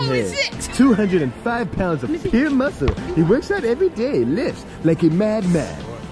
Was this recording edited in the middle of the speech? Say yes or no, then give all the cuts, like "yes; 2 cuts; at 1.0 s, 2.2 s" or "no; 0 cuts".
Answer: no; 0 cuts